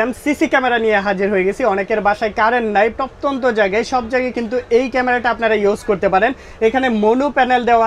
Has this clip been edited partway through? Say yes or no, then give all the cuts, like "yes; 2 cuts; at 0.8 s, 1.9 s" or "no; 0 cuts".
no; 0 cuts